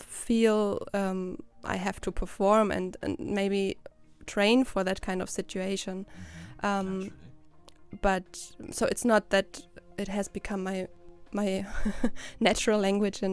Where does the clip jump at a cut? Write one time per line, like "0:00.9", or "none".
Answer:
0:11.0